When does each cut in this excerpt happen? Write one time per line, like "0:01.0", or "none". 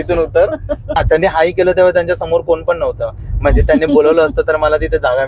0:01.0